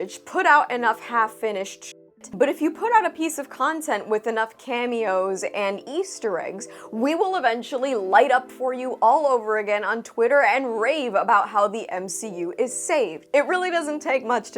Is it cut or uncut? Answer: cut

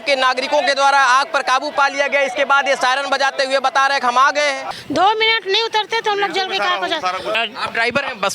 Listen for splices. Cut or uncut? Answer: cut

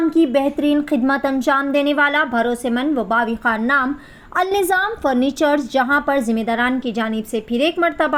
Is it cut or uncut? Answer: uncut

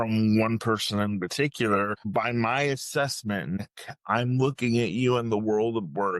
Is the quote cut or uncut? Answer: cut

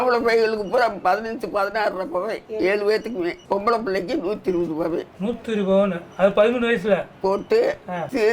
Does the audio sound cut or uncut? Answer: uncut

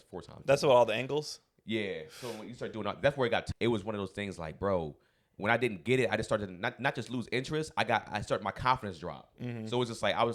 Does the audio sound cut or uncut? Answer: cut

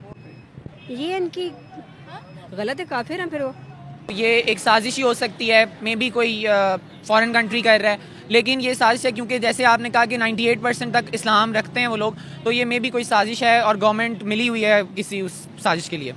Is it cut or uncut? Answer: cut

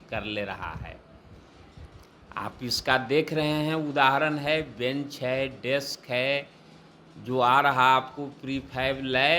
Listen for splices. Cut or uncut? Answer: uncut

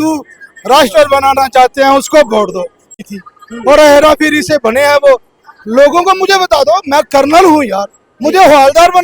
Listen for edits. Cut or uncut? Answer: cut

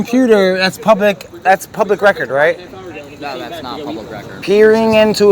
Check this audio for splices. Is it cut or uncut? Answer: cut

